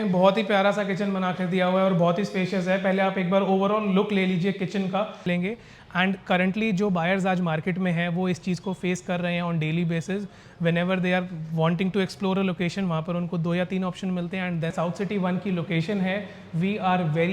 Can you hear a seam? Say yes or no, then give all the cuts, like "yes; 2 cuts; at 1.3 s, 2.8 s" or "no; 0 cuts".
yes; 2 cuts; at 5.3 s, 14.7 s